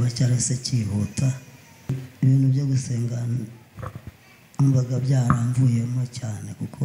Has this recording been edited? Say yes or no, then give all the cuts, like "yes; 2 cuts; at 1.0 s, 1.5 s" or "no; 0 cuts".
yes; 1 cut; at 2.0 s